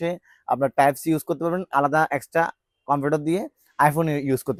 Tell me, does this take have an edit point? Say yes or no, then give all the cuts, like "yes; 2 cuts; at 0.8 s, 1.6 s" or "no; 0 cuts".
no; 0 cuts